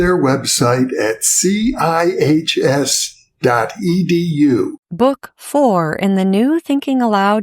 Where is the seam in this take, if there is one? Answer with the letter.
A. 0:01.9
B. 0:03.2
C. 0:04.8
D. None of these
C